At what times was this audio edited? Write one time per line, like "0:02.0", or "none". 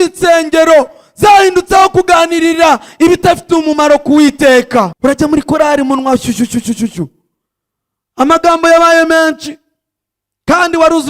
0:04.9